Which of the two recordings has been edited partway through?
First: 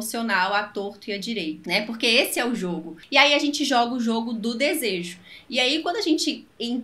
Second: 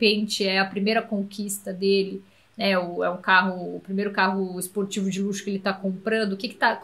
first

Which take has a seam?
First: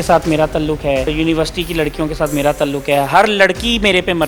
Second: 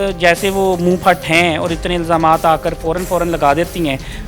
first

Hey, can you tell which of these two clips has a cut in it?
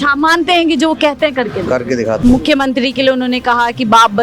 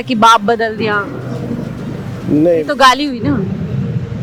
first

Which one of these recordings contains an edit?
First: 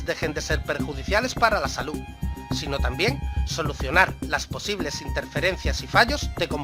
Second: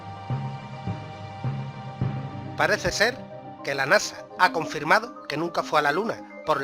second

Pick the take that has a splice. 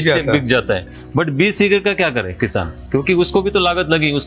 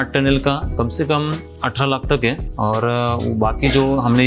second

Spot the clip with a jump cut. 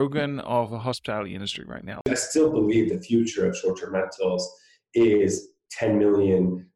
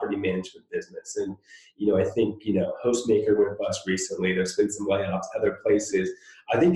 first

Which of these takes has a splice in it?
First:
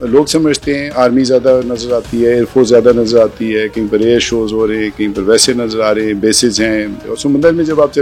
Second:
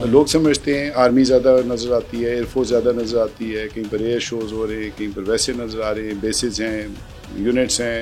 first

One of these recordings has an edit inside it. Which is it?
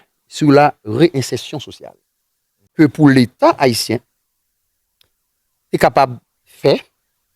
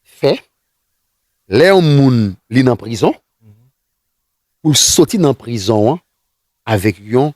first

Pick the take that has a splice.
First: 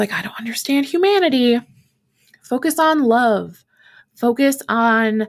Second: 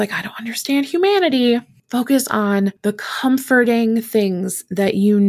second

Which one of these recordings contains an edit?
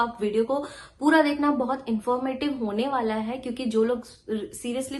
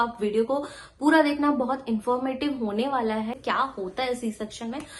second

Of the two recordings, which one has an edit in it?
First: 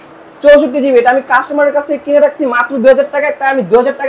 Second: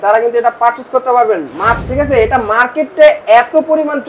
second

